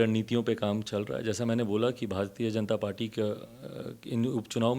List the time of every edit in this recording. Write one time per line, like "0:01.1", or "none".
none